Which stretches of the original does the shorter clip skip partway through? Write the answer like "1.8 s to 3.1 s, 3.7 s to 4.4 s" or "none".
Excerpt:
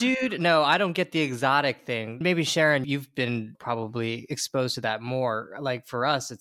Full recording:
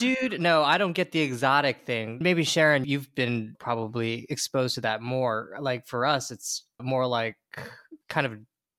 none

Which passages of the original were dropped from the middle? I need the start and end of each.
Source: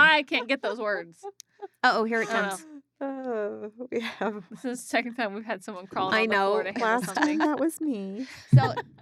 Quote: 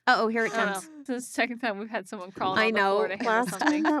2.7 s to 4.5 s

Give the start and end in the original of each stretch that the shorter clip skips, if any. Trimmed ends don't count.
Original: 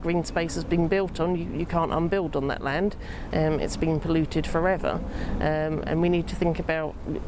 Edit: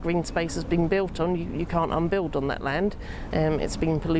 none

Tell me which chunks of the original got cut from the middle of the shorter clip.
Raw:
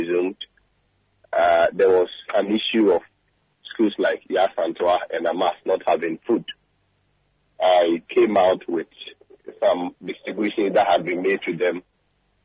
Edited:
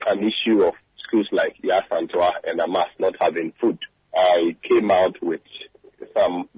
3.2 s to 3.6 s, 6.6 s to 7.4 s

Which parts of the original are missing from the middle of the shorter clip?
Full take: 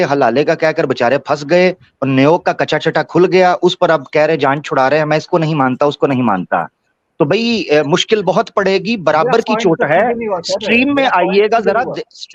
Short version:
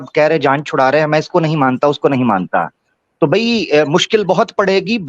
none

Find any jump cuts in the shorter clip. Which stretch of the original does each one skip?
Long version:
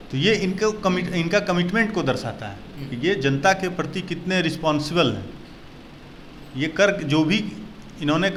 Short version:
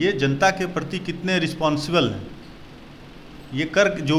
none

